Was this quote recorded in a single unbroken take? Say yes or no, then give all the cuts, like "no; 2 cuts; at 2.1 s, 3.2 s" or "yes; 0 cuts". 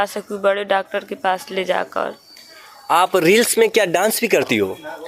yes; 0 cuts